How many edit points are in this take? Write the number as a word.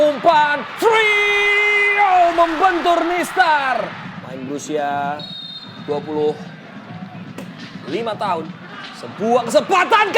one